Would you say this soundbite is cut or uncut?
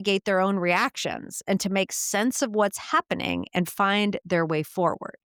uncut